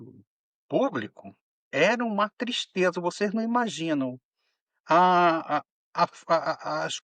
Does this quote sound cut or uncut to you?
uncut